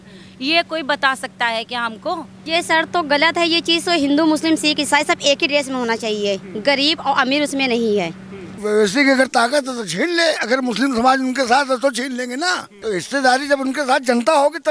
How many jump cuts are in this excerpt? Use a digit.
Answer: 3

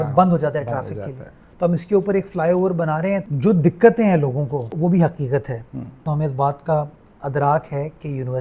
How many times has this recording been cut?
3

